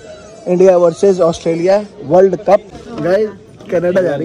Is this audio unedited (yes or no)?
no